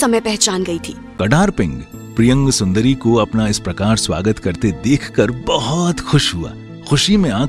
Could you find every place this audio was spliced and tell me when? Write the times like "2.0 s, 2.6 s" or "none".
1.1 s